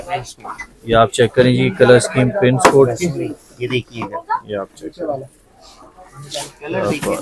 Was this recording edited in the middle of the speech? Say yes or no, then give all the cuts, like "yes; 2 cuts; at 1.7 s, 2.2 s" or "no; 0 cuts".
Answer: no; 0 cuts